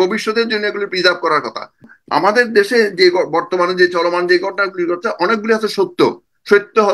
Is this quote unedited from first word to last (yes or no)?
no